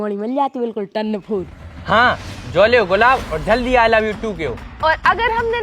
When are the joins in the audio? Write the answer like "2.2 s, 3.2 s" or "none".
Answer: 1.7 s, 4.6 s